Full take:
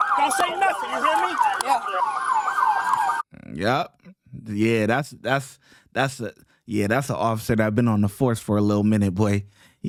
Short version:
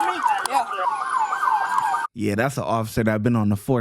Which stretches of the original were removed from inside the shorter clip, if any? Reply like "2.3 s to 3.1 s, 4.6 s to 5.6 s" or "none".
3.2 s to 6.6 s

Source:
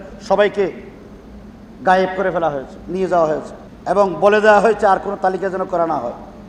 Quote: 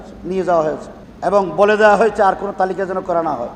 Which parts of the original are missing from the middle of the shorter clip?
none

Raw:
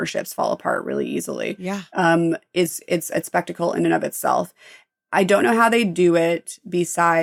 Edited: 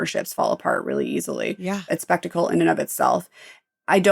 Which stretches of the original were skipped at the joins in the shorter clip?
1.8 s to 3.1 s

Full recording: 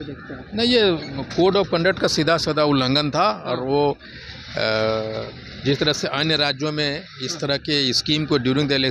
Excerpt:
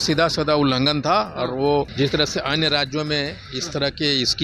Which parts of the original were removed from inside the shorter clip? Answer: 4.0 s to 5.6 s

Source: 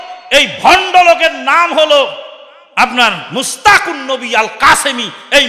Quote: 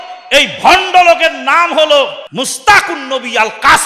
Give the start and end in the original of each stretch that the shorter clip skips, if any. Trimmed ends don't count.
2.3 s to 3.2 s

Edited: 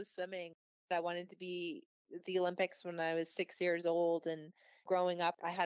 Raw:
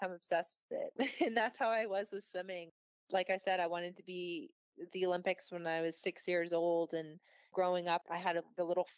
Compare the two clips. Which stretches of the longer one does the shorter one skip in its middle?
3.1 s to 3.6 s

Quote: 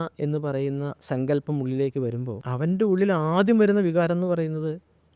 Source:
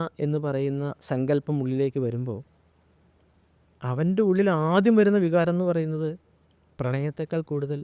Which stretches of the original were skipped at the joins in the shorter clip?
2.4 s to 3.8 s

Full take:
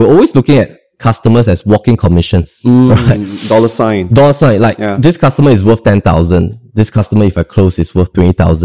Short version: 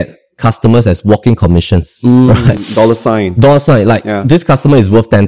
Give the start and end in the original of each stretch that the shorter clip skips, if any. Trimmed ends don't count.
3.2 s to 3.4 s

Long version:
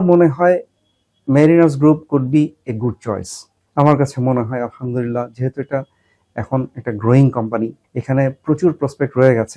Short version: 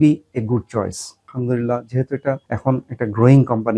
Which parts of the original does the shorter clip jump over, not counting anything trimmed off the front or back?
3.6 s to 4.8 s, 6.0 s to 6.4 s

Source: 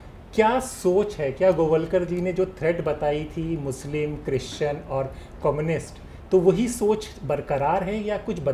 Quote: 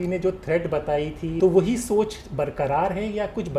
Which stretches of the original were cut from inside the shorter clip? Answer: 3.5 s to 6.3 s

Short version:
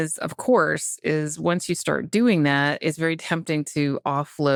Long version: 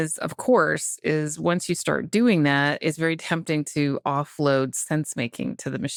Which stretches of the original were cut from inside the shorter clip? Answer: none

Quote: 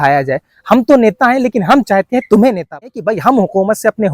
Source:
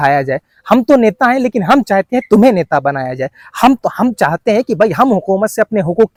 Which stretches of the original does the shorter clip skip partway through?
2.9 s to 4.7 s

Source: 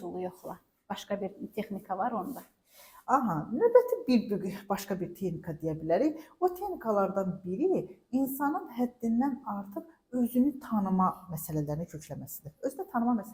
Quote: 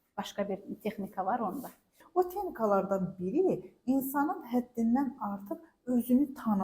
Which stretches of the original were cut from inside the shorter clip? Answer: 2.7 s to 6.3 s

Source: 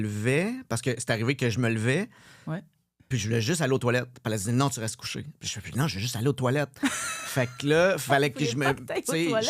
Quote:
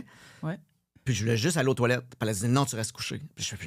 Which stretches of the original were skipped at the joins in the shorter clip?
none

